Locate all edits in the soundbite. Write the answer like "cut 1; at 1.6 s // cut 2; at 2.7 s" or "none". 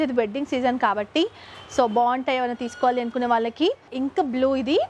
cut 1; at 3.9 s